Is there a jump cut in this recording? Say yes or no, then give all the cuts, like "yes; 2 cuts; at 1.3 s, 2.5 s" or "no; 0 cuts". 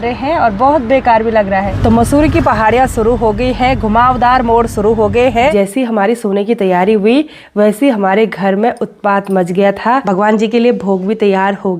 yes; 3 cuts; at 1.7 s, 5.5 s, 10.0 s